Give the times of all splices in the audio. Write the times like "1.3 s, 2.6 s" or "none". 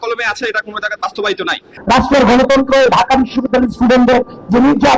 1.7 s